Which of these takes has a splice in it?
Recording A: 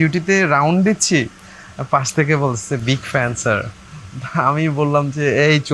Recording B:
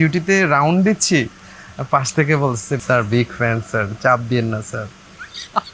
B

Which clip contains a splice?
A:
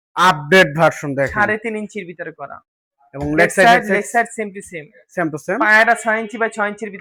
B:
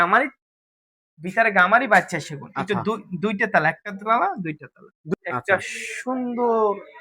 B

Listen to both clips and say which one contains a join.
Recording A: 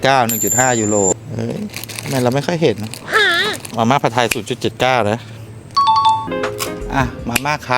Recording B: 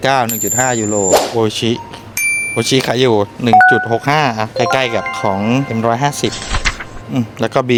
A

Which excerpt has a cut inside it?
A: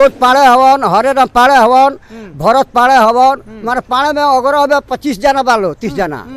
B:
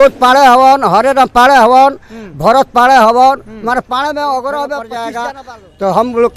B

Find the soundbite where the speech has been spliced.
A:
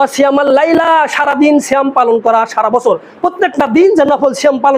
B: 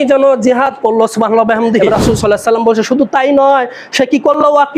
B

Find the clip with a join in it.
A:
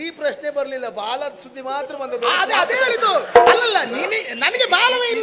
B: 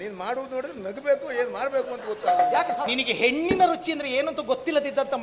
B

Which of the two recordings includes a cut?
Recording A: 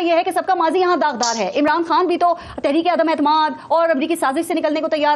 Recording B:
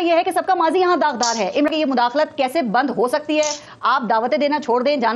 B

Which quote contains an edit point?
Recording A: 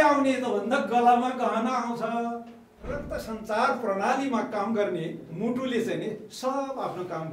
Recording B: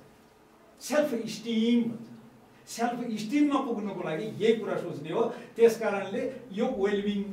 A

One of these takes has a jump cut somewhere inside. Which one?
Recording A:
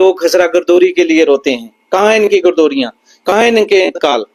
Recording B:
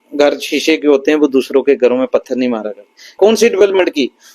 B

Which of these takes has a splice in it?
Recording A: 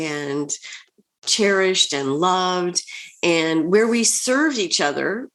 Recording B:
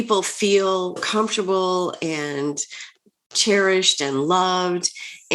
B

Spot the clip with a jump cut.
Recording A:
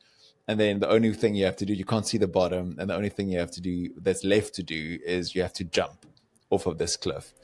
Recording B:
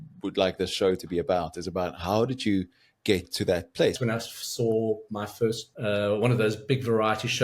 B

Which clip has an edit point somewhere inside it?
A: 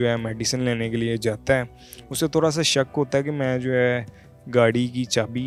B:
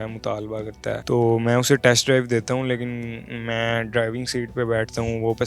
B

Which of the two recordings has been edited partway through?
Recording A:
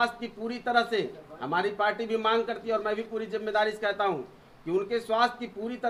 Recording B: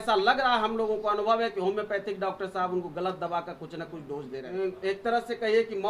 B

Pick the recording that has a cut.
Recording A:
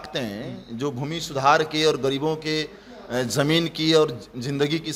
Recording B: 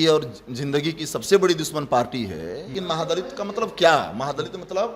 B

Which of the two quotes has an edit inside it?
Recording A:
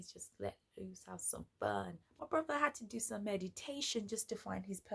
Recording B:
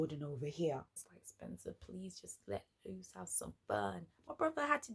B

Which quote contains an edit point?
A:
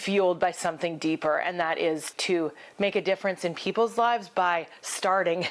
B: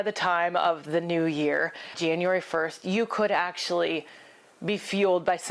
A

